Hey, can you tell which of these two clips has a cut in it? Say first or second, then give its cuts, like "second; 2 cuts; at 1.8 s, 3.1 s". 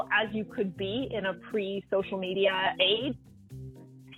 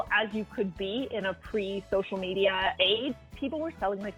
second; 1 cut; at 3.3 s